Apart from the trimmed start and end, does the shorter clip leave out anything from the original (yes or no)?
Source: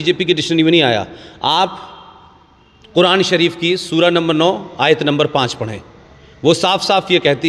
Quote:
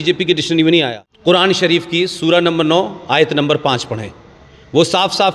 yes